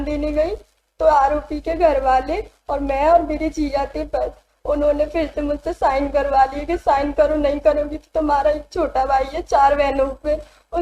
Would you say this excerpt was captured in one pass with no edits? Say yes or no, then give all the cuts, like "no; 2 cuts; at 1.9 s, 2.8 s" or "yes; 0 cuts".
yes; 0 cuts